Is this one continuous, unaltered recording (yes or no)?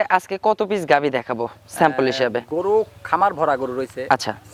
yes